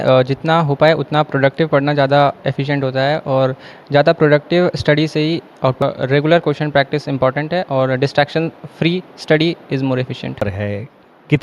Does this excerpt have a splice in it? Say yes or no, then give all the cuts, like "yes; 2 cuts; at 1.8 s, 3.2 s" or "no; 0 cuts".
yes; 2 cuts; at 5.8 s, 10.5 s